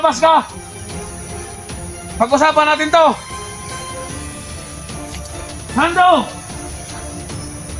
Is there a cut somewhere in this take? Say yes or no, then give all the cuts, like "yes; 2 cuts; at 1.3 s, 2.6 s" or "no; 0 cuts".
no; 0 cuts